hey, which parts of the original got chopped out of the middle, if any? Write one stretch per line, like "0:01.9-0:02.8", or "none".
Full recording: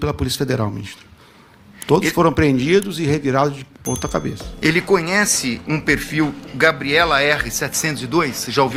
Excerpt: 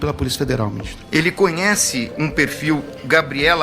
0:00.9-0:04.4